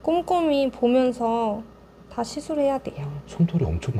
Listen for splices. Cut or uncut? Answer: uncut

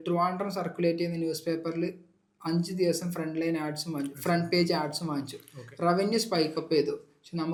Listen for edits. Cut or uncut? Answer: uncut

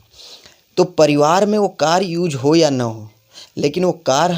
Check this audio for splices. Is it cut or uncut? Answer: uncut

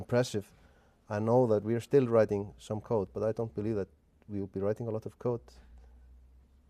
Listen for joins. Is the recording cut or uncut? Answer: uncut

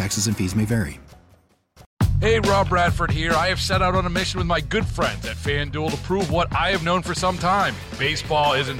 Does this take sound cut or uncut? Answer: cut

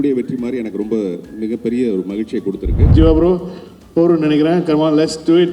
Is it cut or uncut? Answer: cut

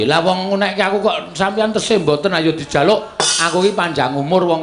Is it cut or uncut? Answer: uncut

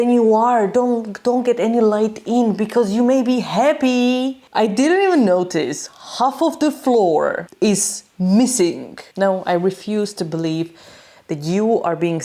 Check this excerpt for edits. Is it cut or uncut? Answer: cut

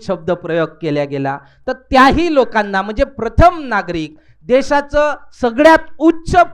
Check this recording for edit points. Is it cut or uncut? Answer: uncut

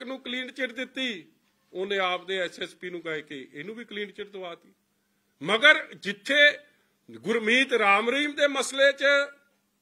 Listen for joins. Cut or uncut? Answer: uncut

